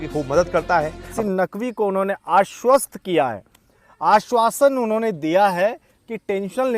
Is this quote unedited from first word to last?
no; 1 cut; at 1.0 s

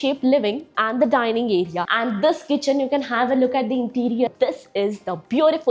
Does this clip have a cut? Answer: yes; 2 cuts; at 1.9 s, 4.3 s

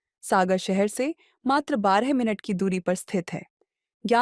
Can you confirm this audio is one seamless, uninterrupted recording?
yes; 0 cuts

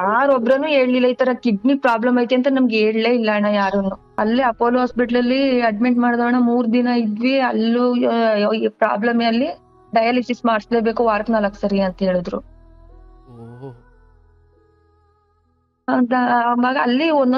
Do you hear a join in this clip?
yes; 1 cut; at 4.2 s

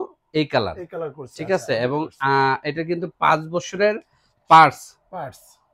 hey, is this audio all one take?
yes; 0 cuts

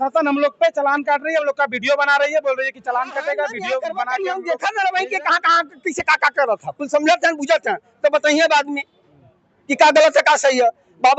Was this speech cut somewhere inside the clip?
yes; 1 cut; at 4.0 s

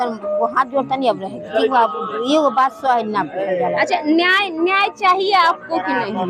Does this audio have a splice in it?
no; 0 cuts

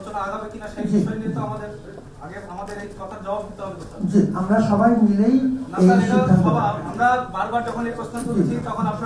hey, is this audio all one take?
yes; 0 cuts

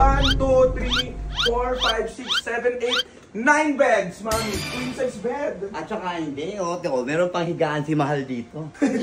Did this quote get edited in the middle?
no; 0 cuts

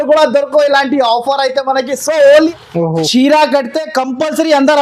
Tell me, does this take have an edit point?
yes; 1 cut; at 2.5 s

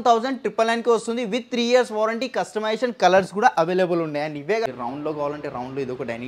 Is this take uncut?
no; 1 cut; at 4.7 s

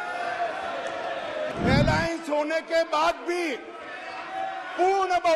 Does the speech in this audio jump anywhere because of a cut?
yes; 1 cut; at 1.5 s

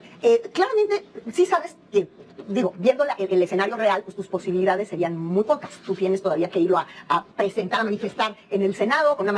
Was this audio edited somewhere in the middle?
no; 0 cuts

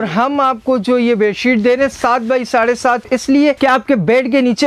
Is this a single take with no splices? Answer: no; 1 cut; at 3.2 s

